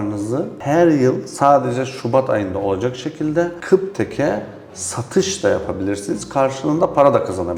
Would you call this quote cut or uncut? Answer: uncut